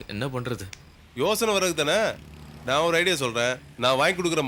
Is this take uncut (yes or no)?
yes